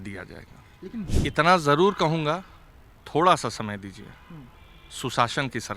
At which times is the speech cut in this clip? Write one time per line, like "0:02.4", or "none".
0:01.1